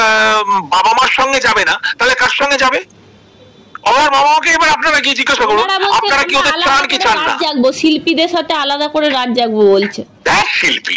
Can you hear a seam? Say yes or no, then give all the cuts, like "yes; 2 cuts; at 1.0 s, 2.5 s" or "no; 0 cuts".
no; 0 cuts